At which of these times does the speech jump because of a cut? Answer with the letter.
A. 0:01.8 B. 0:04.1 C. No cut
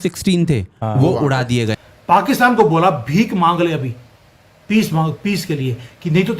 A